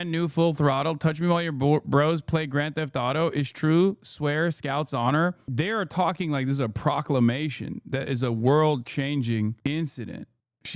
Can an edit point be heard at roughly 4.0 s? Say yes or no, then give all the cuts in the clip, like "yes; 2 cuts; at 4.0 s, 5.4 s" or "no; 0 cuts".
no; 2 cuts; at 5.4 s, 9.6 s